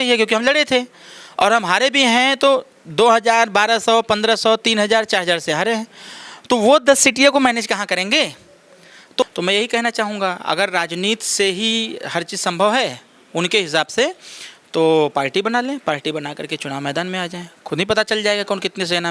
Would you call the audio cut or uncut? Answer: cut